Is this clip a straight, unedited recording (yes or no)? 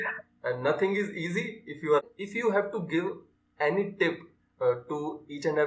no